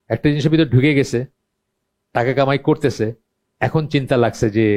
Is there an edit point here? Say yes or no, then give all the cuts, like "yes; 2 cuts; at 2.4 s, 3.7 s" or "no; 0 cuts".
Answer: no; 0 cuts